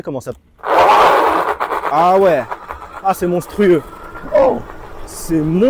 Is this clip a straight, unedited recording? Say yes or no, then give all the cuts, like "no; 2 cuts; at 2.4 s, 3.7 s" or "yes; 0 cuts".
yes; 0 cuts